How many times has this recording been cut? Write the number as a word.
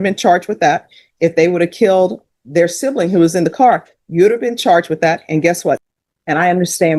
one